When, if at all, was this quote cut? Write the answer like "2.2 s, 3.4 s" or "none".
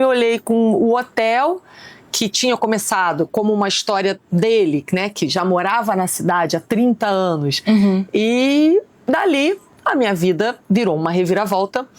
none